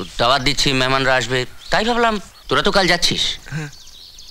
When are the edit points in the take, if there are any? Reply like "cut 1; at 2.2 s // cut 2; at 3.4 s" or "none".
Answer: cut 1; at 2.3 s